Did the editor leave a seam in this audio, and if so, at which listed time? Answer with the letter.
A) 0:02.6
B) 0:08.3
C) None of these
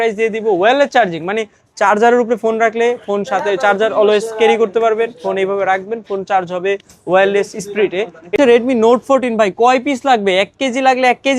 B